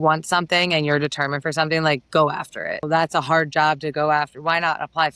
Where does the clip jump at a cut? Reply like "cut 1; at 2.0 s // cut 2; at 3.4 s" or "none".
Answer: cut 1; at 2.8 s